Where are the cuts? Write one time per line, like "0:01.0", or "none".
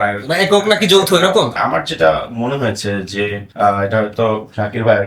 0:01.5
0:03.4